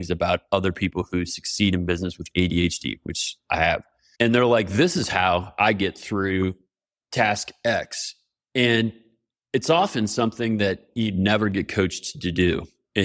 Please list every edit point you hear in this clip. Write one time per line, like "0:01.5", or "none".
none